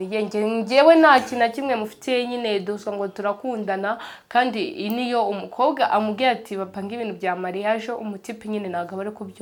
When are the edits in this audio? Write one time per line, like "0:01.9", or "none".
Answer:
none